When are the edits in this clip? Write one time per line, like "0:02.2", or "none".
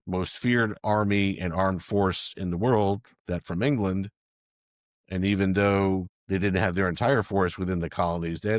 none

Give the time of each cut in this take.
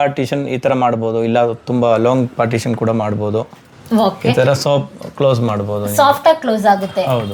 none

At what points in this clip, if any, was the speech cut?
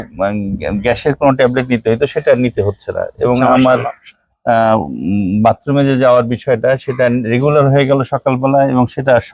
none

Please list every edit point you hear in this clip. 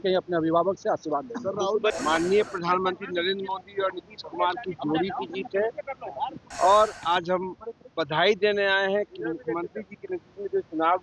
0:02.0

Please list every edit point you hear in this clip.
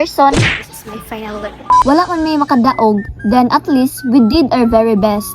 0:01.7

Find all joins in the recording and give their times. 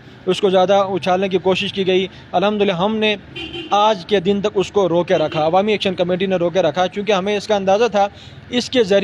0:02.1

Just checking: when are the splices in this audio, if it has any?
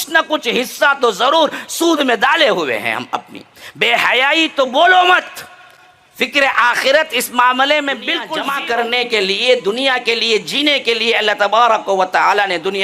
0:08.3

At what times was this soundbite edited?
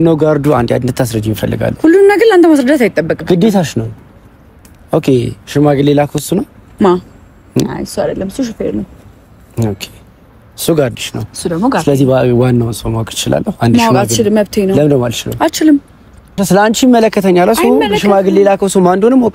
0:16.4

